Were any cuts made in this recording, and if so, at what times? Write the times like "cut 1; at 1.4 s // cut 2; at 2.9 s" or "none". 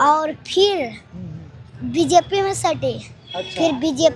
none